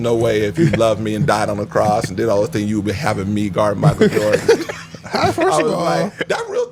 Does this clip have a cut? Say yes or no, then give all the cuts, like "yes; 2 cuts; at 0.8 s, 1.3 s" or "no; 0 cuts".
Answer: no; 0 cuts